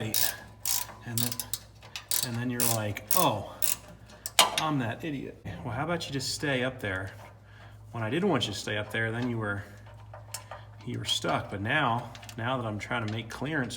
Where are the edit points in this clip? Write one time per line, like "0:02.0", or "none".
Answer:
0:05.5